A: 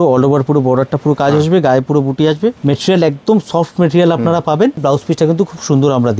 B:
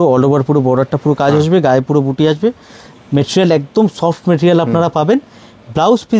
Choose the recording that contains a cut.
A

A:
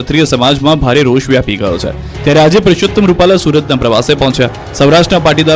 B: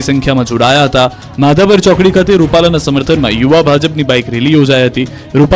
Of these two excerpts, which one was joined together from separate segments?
B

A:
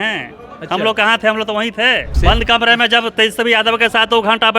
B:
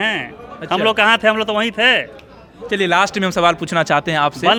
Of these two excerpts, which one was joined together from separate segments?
A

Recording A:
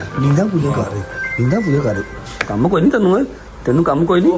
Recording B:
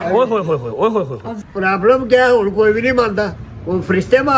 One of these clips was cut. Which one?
B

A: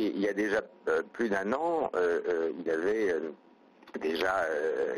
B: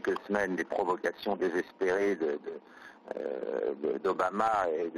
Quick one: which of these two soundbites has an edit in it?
A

